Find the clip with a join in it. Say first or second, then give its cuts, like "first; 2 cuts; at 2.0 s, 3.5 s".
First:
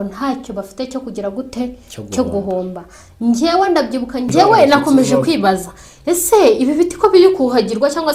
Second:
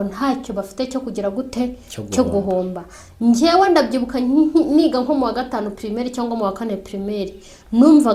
first; 1 cut; at 4.3 s